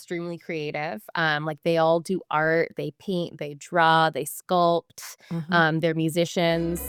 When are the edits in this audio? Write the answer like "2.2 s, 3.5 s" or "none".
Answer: none